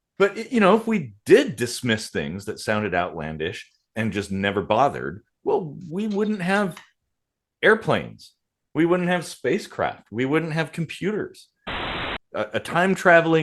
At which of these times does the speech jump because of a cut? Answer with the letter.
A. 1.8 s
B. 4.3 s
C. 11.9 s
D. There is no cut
C